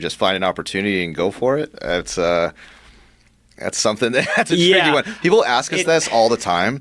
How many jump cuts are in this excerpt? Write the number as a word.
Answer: zero